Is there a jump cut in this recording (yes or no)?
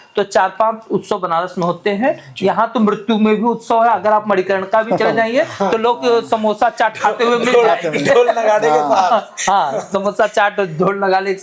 no